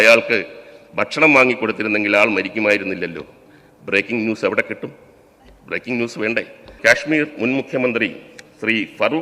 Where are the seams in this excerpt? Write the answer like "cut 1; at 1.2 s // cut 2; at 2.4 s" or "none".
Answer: cut 1; at 6.7 s

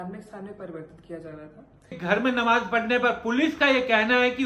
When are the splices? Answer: cut 1; at 2.0 s

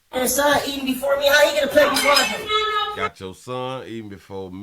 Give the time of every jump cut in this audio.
none

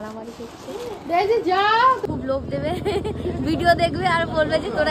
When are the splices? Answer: cut 1; at 2.0 s

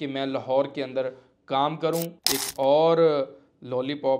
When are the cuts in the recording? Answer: cut 1; at 2.2 s

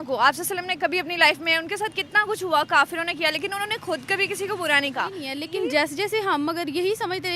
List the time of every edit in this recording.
cut 1; at 5.3 s

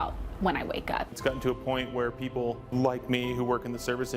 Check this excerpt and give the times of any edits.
cut 1; at 1.1 s // cut 2; at 2.7 s

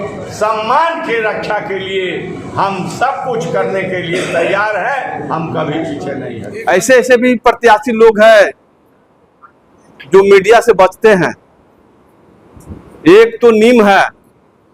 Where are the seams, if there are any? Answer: cut 1; at 6.5 s

